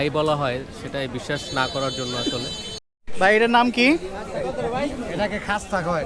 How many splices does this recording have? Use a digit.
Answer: 1